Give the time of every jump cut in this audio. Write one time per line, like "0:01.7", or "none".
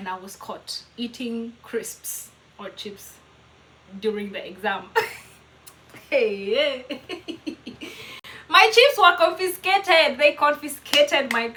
none